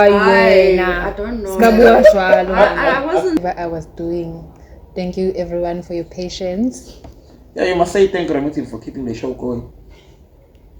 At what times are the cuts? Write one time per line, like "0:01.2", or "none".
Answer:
0:03.4